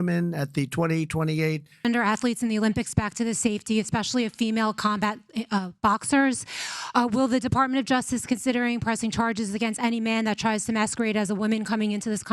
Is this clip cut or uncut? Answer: cut